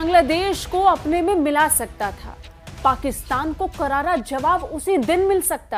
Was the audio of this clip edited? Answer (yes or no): no